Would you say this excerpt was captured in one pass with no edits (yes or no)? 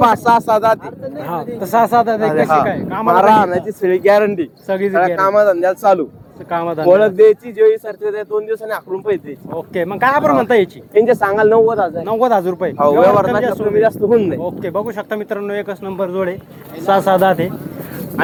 yes